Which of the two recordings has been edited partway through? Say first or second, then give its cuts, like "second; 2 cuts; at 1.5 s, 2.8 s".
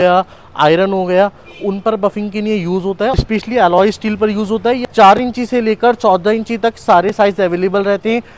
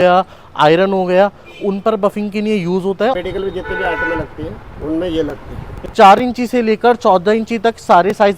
second; 2 cuts; at 3.1 s, 5.9 s